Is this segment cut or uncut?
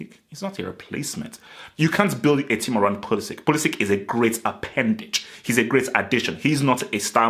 uncut